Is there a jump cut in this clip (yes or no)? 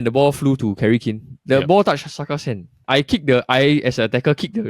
yes